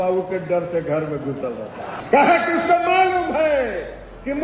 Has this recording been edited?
yes; 1 cut; at 2.0 s

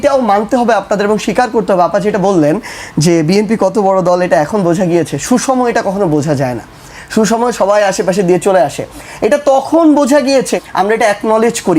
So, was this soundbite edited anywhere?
yes; 1 cut; at 10.5 s

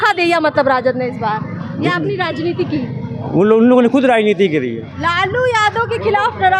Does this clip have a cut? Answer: yes; 1 cut; at 4.9 s

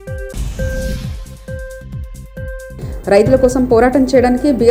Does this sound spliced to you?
no; 0 cuts

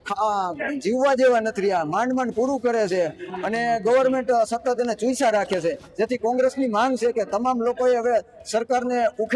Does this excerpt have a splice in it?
no; 0 cuts

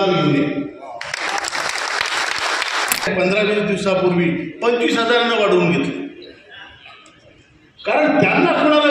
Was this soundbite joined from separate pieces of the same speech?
yes; 1 cut; at 3.1 s

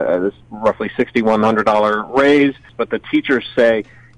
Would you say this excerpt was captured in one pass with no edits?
no; 1 cut; at 2.7 s

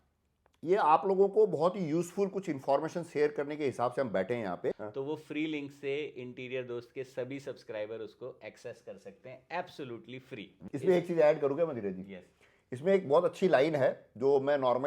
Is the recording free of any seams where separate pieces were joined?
no; 2 cuts; at 4.8 s, 10.6 s

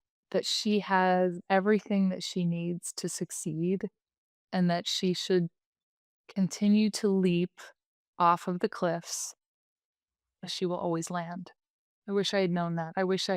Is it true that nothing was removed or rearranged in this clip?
no; 2 cuts; at 1.4 s, 10.4 s

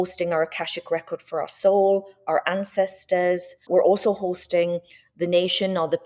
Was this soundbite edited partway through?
yes; 1 cut; at 3.6 s

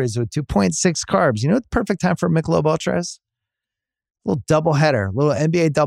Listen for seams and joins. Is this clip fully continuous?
yes; 0 cuts

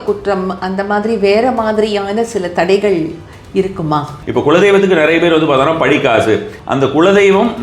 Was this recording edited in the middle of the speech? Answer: yes; 2 cuts; at 4.2 s, 6.6 s

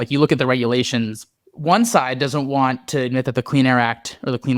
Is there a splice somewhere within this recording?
no; 0 cuts

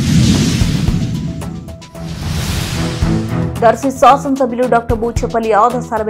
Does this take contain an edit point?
yes; 1 cut; at 3.5 s

